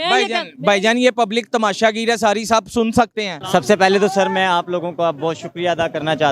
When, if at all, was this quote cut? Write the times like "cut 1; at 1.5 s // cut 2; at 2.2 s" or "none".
cut 1; at 3.4 s